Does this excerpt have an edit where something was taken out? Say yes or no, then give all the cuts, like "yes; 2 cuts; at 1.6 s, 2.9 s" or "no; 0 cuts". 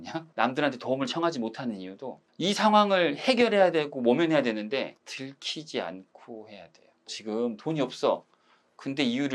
yes; 1 cut; at 7.1 s